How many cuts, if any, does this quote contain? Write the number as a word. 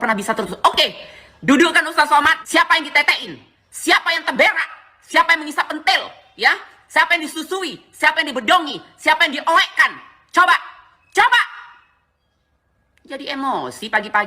one